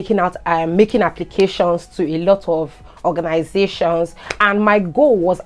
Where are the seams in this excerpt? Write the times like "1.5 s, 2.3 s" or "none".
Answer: 4.3 s